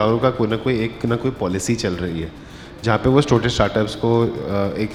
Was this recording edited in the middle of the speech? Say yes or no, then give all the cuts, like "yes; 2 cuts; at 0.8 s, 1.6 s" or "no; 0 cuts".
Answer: no; 0 cuts